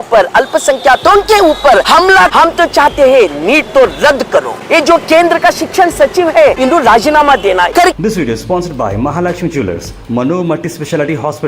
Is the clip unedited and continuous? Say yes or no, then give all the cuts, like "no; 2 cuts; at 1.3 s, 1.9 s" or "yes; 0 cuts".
no; 4 cuts; at 2.1 s, 4.6 s, 6.6 s, 7.8 s